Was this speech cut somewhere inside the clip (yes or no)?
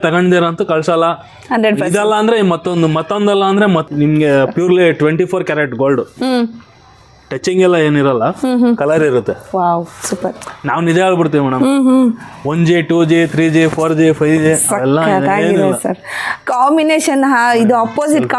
yes